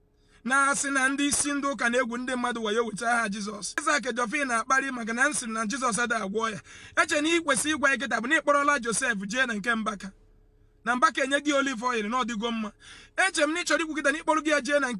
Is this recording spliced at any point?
yes; 1 cut; at 3.8 s

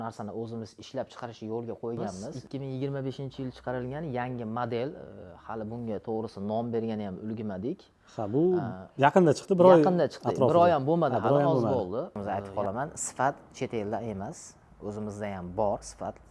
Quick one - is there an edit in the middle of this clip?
yes; 2 cuts; at 2.4 s, 12.2 s

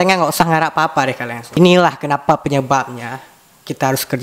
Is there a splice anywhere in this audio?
no; 0 cuts

